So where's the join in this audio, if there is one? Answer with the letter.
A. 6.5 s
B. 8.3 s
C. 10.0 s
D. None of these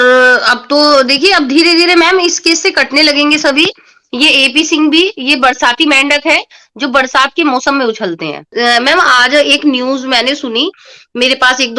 B